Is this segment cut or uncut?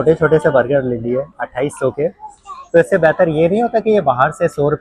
uncut